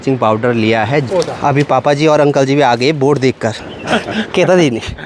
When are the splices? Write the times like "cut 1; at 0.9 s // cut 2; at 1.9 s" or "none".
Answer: cut 1; at 1.1 s // cut 2; at 3.7 s